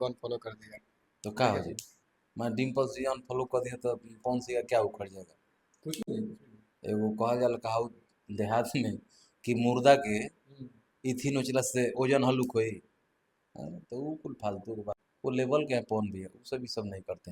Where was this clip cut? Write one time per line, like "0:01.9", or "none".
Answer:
0:15.1